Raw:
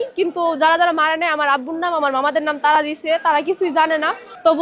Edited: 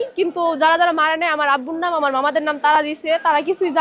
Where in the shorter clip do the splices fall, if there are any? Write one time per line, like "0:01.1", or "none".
none